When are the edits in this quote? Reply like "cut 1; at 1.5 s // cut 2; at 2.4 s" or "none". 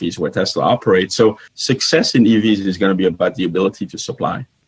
cut 1; at 1.5 s